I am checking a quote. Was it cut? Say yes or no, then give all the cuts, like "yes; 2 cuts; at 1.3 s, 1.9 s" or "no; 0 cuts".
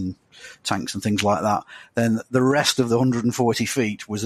no; 0 cuts